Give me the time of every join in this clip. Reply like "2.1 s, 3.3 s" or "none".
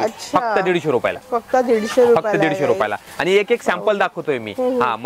none